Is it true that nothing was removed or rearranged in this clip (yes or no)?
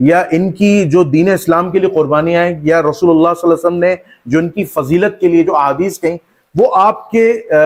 yes